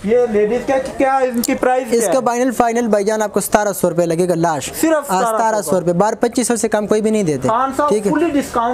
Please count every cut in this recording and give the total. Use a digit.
0